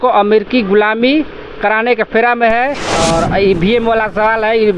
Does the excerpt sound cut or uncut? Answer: cut